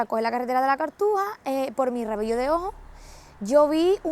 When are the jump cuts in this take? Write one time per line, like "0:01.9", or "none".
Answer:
none